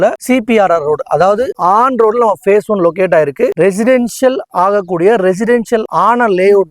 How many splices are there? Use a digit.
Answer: 3